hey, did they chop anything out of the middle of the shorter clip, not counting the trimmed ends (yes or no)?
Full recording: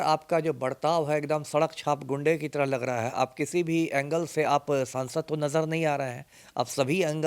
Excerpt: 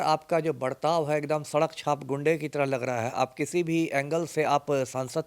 no